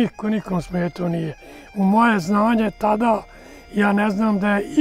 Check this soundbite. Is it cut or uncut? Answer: uncut